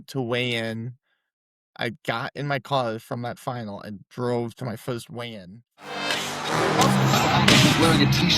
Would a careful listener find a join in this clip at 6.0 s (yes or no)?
yes